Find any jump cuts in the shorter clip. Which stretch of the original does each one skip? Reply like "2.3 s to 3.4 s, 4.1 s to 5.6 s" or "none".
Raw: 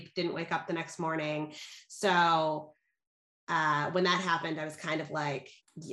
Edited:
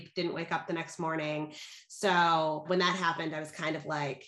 2.6 s to 3.9 s